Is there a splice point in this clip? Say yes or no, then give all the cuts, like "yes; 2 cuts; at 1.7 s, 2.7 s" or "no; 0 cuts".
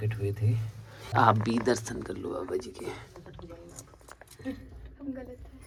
no; 0 cuts